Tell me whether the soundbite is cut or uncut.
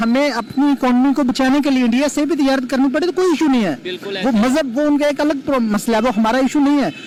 uncut